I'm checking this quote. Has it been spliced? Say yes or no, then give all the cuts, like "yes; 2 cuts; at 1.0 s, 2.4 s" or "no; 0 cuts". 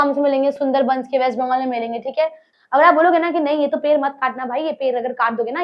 yes; 1 cut; at 2.5 s